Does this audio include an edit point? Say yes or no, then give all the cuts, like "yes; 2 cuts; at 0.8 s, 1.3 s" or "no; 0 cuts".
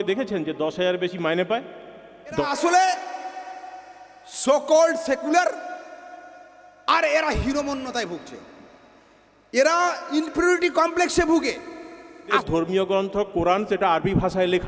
yes; 2 cuts; at 2.5 s, 12.4 s